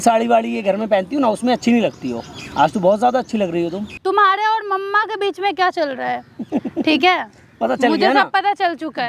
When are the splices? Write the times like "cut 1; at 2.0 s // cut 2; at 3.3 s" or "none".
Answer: cut 1; at 3.9 s